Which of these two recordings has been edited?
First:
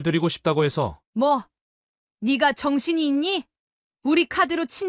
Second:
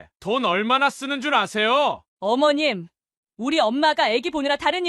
second; 1 cut; at 2.0 s

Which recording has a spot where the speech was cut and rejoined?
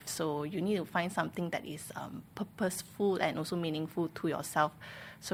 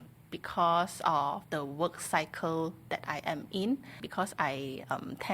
second; 2 cuts; at 1.4 s, 4.1 s

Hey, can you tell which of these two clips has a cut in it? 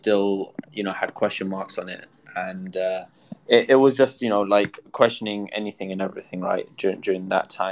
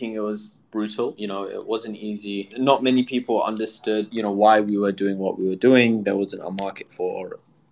second; 3 cuts; at 1.2 s, 2.5 s, 4.1 s

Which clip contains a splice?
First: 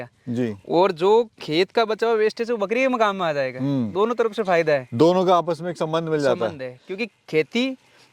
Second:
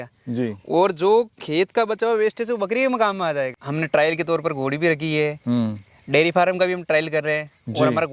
second; 1 cut; at 3.5 s

